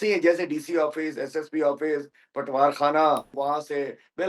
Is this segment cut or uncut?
cut